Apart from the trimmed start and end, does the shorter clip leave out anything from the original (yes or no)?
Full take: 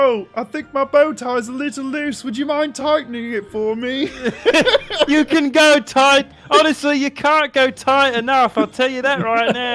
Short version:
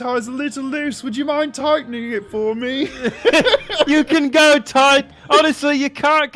no